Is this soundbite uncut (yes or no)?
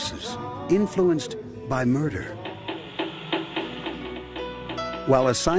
yes